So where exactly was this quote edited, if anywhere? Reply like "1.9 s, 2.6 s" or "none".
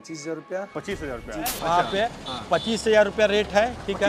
1.6 s

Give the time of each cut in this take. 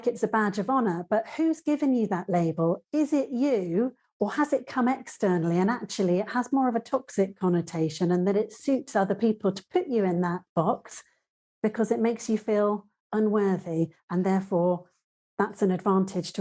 none

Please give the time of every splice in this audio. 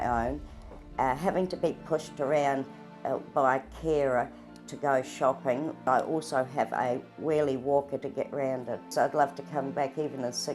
5.8 s, 8.9 s

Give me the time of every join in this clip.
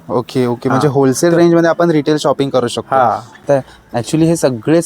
3.4 s

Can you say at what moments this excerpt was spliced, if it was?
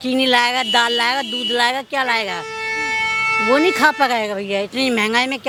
none

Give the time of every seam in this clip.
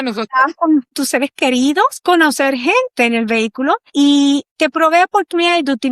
0.9 s, 4.1 s

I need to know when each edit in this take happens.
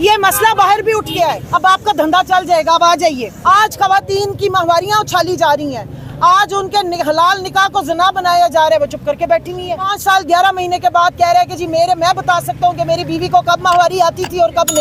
1.4 s, 3.3 s, 9.9 s

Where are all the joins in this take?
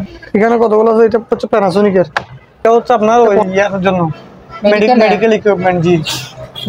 2.6 s

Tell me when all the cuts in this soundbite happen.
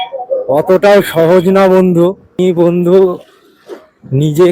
2.3 s

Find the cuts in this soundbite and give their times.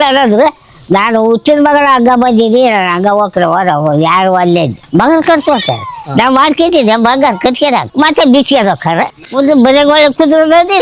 4.8 s, 7.9 s, 9.2 s

